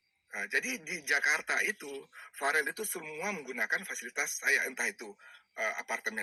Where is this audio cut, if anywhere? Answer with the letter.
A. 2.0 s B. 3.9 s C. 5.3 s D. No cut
D